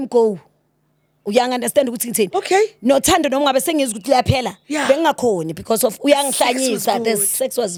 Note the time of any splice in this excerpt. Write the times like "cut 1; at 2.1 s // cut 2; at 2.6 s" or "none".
none